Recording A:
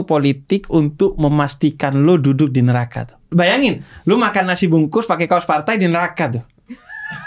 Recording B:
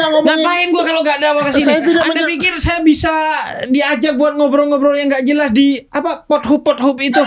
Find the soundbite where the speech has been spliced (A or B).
A